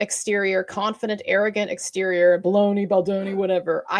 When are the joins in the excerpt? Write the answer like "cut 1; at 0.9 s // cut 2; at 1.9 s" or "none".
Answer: none